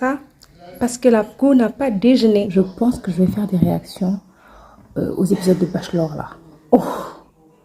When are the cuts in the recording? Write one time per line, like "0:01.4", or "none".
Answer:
0:02.5